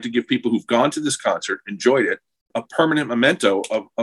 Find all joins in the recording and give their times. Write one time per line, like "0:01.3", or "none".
0:02.5